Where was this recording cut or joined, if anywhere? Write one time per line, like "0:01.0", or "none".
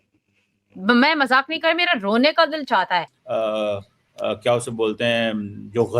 0:03.2